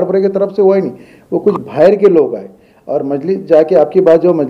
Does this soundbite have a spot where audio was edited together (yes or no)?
no